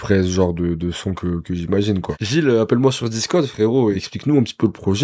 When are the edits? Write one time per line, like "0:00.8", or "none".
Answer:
0:02.1
0:04.0